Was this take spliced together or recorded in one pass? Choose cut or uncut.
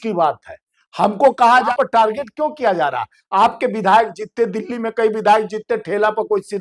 cut